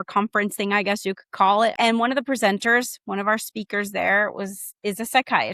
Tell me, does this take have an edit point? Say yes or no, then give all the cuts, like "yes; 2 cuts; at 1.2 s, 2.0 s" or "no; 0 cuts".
yes; 1 cut; at 1.7 s